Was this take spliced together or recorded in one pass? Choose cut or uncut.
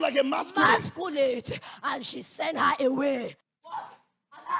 uncut